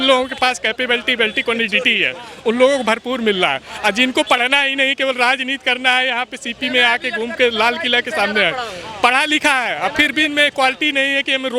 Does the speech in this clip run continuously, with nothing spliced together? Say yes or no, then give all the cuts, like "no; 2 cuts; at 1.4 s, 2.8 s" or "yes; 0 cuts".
yes; 0 cuts